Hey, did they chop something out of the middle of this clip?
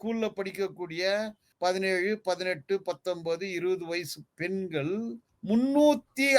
yes; 2 cuts; at 1.4 s, 5.3 s

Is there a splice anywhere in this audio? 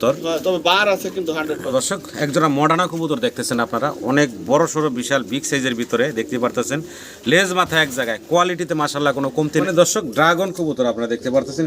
yes; 2 cuts; at 1.6 s, 9.6 s

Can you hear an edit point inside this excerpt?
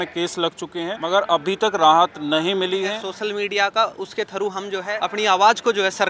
yes; 3 cuts; at 1.0 s, 3.1 s, 4.9 s

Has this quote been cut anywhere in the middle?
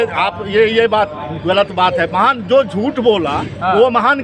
no; 0 cuts

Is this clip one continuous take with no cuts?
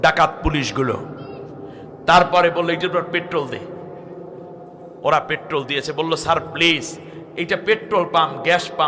yes; 0 cuts

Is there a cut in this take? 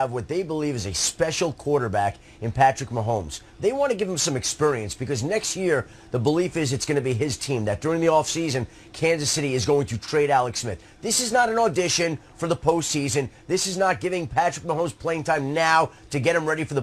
yes; 1 cut; at 8.8 s

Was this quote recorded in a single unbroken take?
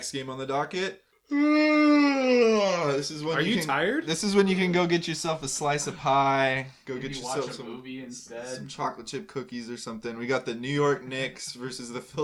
no; 1 cut; at 1.1 s

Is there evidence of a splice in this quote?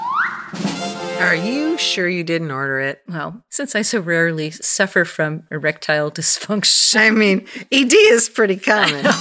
yes; 1 cut; at 1.2 s

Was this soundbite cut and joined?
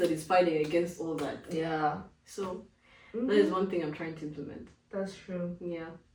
no; 0 cuts

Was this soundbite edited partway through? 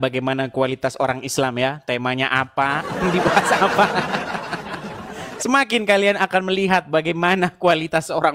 no; 0 cuts

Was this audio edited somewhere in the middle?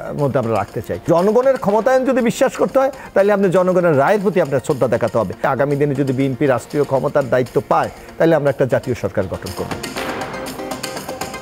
yes; 3 cuts; at 1.1 s, 5.5 s, 9.8 s

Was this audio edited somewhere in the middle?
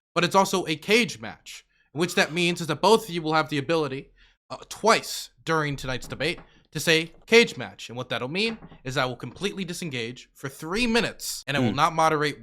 yes; 1 cut; at 11.3 s

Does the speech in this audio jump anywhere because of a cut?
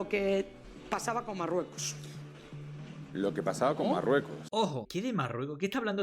yes; 1 cut; at 4.8 s

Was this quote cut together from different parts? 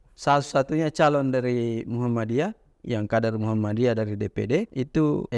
no; 0 cuts

